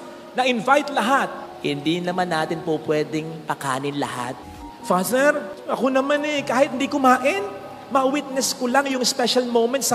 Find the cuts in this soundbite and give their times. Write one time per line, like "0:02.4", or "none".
0:04.4